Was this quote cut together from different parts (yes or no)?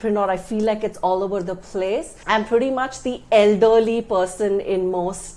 yes